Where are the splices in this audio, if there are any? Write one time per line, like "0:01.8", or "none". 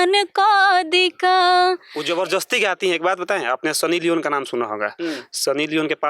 0:01.9